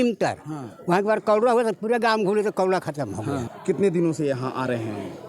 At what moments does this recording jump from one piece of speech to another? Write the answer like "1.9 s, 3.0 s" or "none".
3.5 s

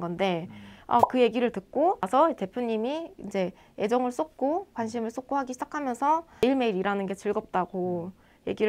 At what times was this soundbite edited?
none

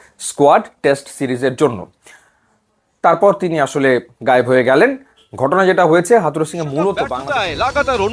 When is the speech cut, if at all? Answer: 7.1 s

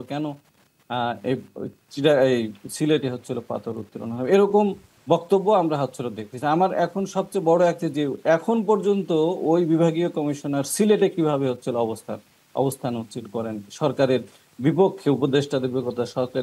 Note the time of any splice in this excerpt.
none

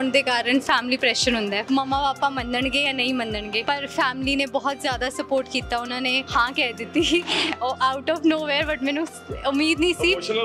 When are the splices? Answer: 1.6 s, 3.6 s, 6.2 s

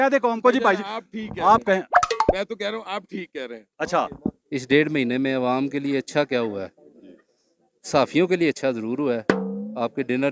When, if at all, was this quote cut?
4.4 s

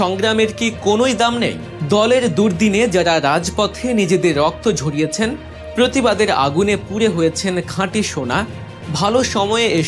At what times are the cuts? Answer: none

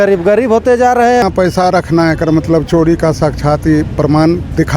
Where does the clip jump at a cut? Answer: 1.2 s

